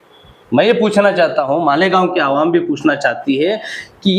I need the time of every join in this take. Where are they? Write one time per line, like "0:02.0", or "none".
none